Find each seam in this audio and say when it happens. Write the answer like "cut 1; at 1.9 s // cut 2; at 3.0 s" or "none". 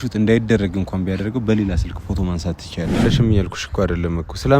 cut 1; at 3.0 s